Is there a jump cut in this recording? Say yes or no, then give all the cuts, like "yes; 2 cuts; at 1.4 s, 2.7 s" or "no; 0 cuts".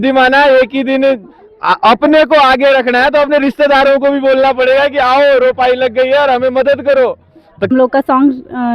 yes; 1 cut; at 7.7 s